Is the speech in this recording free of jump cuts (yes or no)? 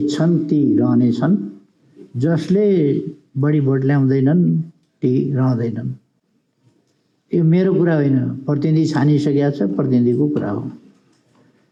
yes